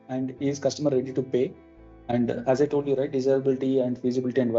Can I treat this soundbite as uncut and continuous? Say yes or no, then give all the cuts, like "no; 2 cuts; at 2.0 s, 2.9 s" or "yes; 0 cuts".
yes; 0 cuts